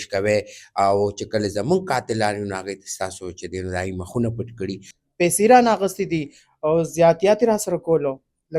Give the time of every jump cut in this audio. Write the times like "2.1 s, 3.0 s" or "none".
4.9 s